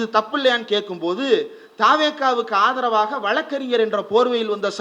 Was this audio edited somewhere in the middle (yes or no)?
no